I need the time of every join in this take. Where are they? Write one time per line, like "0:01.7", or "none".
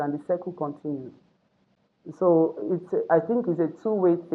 none